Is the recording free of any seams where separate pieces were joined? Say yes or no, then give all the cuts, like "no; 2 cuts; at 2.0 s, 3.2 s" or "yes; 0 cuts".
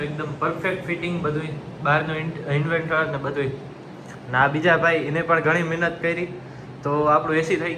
yes; 0 cuts